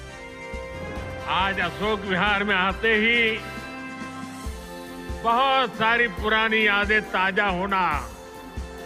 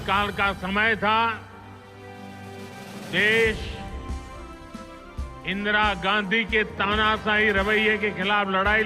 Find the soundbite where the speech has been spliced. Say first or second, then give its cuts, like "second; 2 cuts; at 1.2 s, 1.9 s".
second; 4 cuts; at 1.3 s, 3.1 s, 3.6 s, 5.5 s